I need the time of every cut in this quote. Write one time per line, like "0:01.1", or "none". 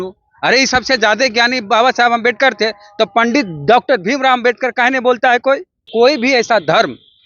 0:05.8